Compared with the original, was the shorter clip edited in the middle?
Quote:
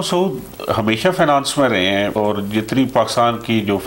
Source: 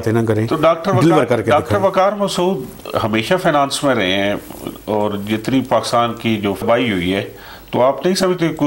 yes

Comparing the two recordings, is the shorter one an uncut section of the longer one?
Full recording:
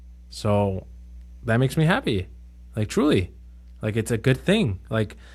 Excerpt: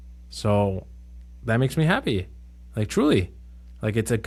yes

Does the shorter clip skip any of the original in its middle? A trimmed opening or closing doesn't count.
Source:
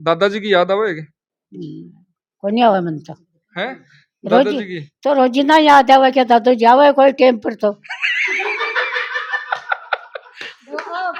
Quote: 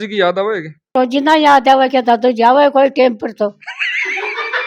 yes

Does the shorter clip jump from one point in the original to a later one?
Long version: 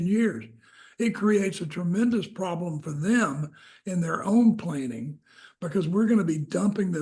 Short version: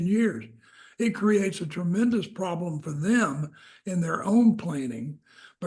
no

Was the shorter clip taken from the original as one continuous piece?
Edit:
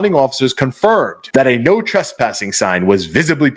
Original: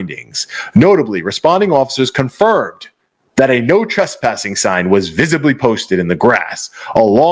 no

